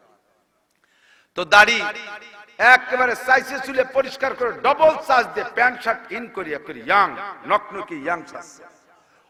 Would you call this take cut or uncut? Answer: uncut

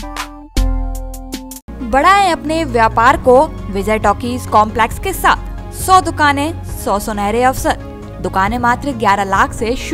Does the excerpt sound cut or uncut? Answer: uncut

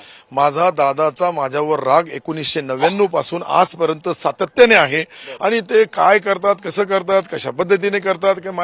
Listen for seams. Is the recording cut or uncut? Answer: uncut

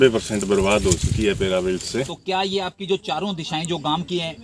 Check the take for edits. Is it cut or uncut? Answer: cut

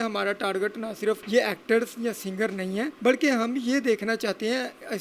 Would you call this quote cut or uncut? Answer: cut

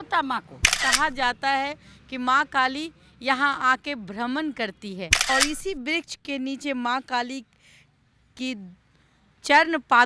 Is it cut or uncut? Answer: cut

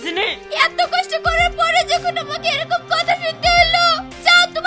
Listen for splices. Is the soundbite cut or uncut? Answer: uncut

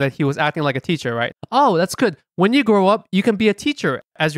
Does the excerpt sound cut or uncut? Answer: cut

